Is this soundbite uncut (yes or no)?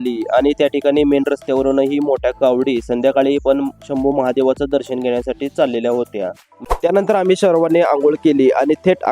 no